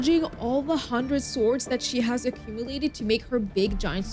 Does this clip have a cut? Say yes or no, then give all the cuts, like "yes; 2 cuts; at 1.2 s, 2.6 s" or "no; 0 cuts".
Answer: no; 0 cuts